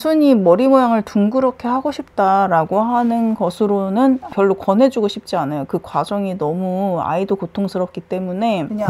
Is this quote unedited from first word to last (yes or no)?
no